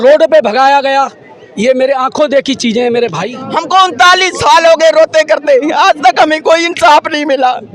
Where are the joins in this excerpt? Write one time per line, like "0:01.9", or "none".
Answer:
0:03.4